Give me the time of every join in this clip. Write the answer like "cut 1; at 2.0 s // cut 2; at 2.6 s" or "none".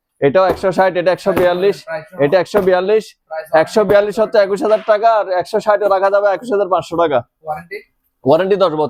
none